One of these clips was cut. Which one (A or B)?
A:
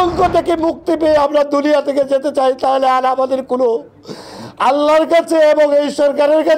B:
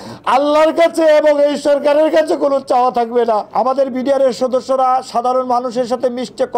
B